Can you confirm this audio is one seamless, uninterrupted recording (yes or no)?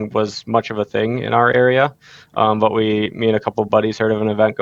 yes